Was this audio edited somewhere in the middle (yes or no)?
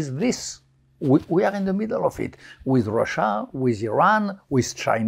no